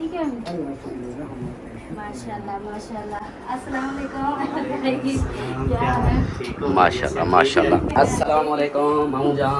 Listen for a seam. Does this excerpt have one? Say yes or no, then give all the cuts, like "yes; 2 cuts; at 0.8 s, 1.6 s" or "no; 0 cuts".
no; 0 cuts